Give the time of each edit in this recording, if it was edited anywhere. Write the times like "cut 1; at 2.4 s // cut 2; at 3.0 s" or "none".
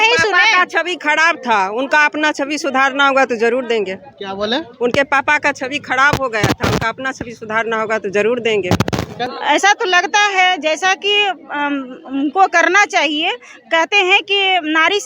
cut 1; at 9.2 s